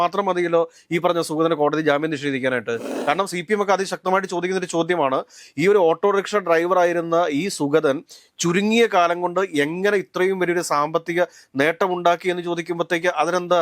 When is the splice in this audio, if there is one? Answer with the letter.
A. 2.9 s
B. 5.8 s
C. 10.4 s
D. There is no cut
A